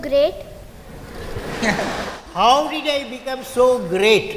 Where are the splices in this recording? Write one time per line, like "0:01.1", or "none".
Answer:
none